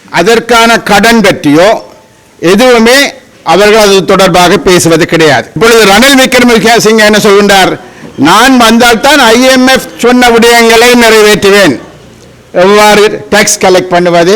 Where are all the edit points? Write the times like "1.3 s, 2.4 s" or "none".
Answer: 5.6 s